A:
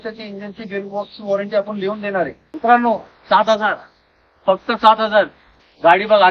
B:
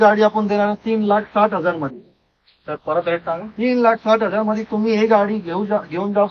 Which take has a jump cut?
A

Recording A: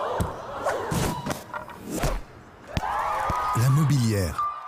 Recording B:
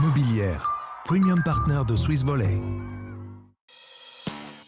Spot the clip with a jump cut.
B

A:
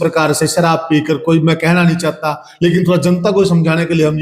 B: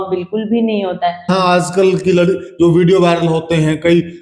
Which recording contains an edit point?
B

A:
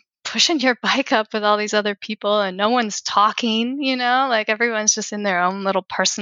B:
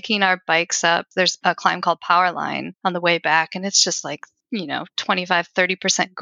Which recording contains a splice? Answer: B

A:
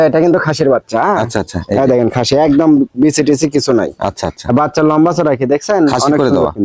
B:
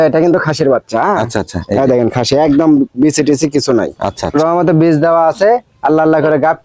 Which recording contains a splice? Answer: B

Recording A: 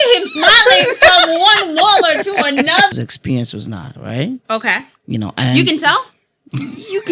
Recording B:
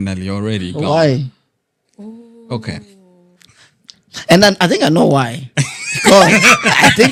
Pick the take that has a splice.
A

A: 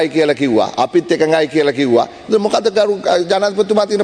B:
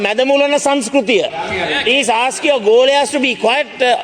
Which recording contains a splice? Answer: B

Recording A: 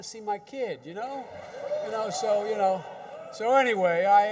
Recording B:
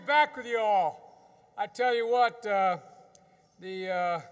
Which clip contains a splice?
A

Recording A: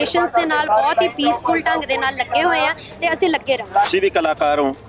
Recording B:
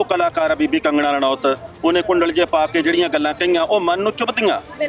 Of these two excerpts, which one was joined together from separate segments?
A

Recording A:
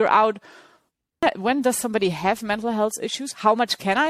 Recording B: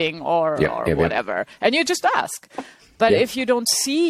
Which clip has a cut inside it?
A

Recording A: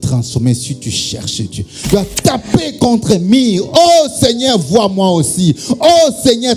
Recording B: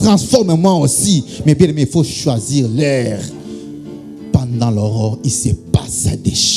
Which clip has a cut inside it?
A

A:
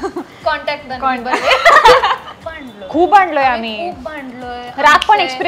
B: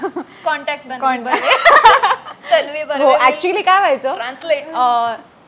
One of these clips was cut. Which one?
A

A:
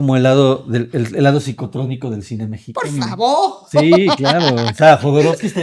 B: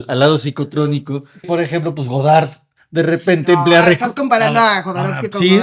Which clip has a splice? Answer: B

